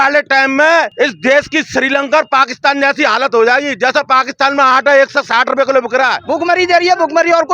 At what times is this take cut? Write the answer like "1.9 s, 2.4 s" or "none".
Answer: 0.9 s, 6.2 s